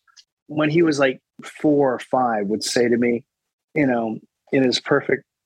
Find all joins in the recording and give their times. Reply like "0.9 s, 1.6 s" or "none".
none

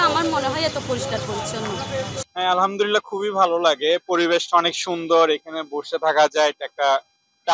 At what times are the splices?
2.2 s

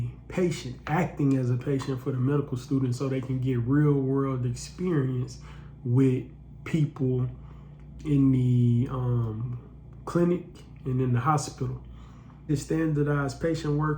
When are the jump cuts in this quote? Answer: 12.5 s

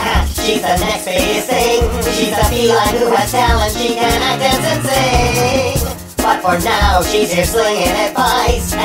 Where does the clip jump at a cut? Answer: none

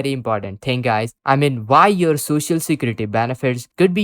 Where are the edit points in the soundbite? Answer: 1.1 s

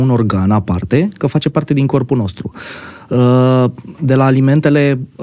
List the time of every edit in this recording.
none

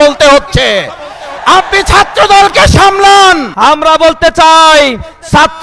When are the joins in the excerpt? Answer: 3.5 s

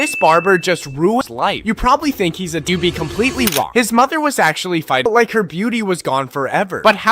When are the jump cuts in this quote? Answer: 1.2 s, 2.7 s, 5.1 s

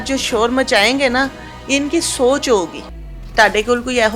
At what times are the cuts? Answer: 3.2 s

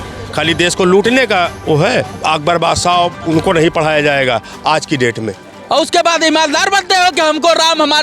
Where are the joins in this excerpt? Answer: 2.1 s, 5.5 s

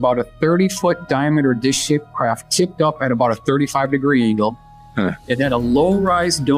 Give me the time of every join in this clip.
none

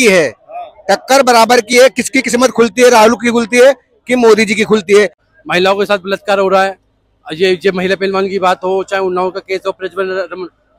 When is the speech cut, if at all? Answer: 5.2 s

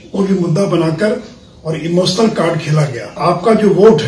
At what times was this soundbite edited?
3.2 s

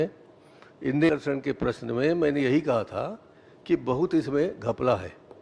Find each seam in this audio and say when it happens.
1.1 s

